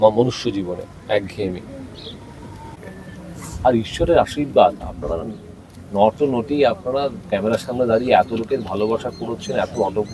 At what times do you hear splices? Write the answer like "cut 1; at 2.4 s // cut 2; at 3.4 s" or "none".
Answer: cut 1; at 2.8 s